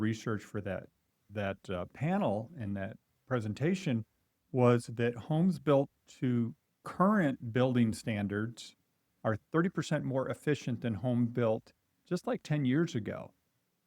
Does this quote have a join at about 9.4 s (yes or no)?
yes